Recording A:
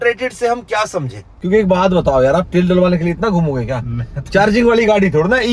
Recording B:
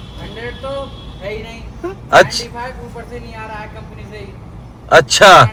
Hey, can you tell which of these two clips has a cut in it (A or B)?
A